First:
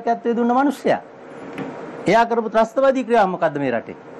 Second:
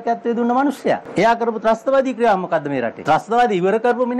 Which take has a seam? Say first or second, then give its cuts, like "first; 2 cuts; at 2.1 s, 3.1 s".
second; 2 cuts; at 1.1 s, 3.0 s